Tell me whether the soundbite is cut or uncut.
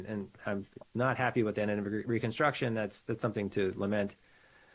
uncut